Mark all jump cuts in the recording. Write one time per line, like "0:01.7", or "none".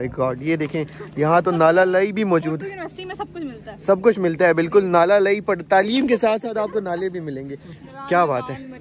none